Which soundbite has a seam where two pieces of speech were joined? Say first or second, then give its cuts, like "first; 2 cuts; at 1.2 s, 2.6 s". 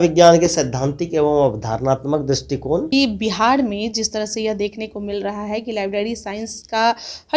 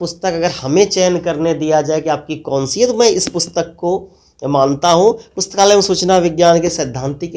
first; 1 cut; at 2.9 s